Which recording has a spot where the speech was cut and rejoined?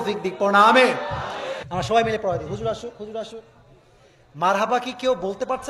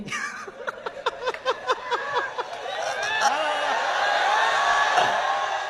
first; 1 cut; at 1.5 s

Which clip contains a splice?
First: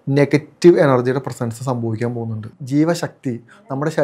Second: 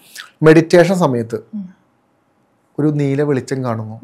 first; 1 cut; at 2.5 s

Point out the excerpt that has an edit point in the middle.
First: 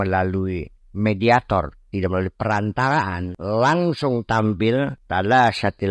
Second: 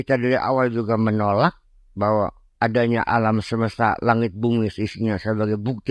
first; 2 cuts; at 3.3 s, 5.0 s

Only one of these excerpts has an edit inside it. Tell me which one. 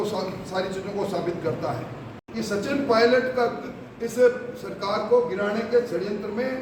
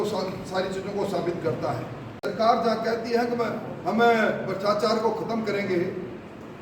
second; 1 cut; at 2.2 s

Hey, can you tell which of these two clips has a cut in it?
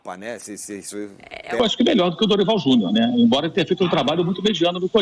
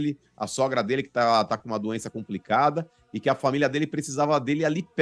first; 1 cut; at 1.6 s

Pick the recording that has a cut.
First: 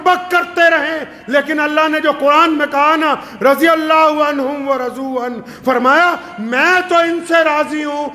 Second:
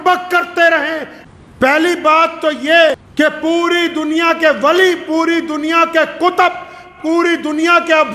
second; 2 cuts; at 1.1 s, 2.9 s

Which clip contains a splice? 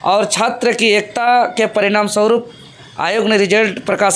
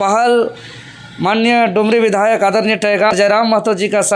second; 1 cut; at 3.1 s

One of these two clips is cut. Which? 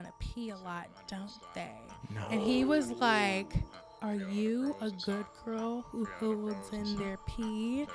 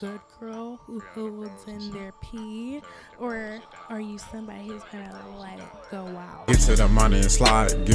second; 1 cut; at 6.3 s

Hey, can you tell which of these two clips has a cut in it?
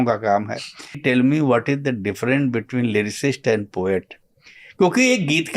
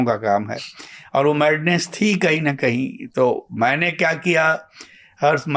first; 2 cuts; at 1.0 s, 4.2 s

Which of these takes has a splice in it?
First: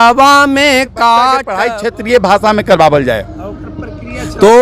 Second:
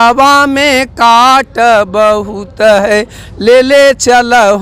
first; 1 cut; at 1.5 s

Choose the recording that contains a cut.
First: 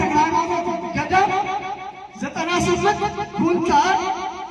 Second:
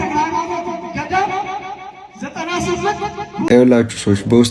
second; 1 cut; at 3.5 s

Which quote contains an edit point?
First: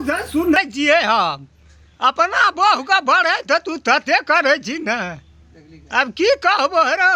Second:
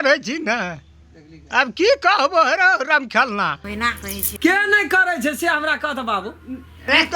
second; 1 cut; at 4.3 s

